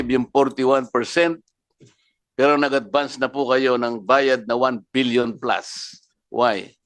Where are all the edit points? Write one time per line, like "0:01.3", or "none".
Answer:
none